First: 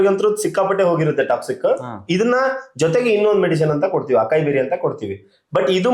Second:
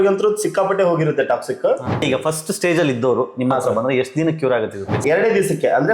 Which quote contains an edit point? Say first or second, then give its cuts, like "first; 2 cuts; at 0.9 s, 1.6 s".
second; 2 cuts; at 2.0 s, 5.0 s